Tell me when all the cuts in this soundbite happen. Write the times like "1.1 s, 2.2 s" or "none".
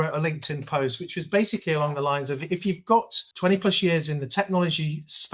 3.2 s